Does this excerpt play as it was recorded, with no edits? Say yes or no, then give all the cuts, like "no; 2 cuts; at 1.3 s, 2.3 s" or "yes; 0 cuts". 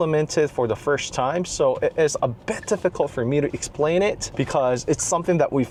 yes; 0 cuts